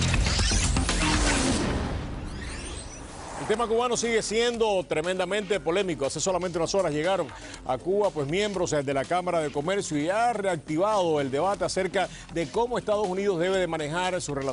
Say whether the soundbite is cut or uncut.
uncut